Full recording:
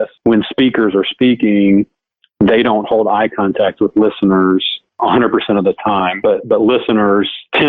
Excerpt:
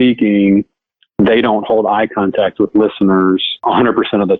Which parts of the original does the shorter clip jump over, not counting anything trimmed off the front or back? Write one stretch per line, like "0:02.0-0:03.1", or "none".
0:04.7-0:04.9